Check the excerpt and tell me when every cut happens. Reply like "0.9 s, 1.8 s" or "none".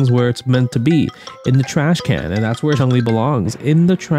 2.8 s